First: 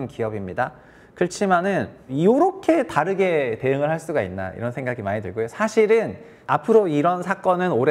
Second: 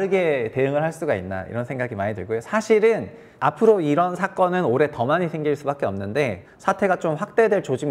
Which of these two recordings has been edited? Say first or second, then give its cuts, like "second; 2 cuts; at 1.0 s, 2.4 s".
second; 1 cut; at 6.4 s